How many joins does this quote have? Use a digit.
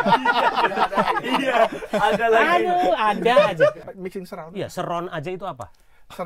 1